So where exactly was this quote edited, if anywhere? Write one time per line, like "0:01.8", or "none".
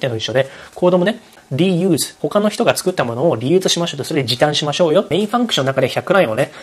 0:01.4
0:05.1